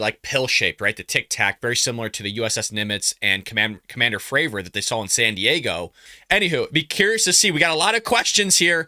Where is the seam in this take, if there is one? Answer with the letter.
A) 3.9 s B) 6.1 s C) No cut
B